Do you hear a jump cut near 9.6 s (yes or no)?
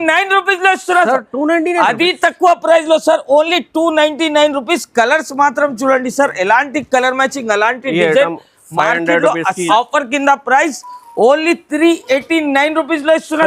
yes